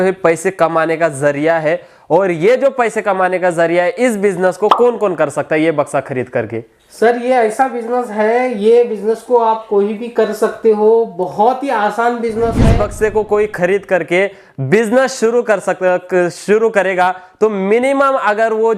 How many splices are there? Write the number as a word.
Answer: one